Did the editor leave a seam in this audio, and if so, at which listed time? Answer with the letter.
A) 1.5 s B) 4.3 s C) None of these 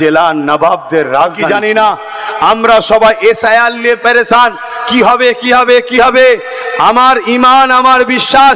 A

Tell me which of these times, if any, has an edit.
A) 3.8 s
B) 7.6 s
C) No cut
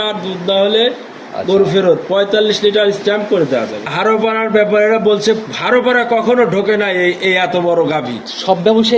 A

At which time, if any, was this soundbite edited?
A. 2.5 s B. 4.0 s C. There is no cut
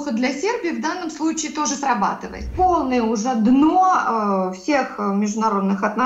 A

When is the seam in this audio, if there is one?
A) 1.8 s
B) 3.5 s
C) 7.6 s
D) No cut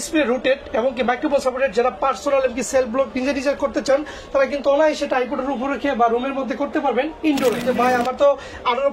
C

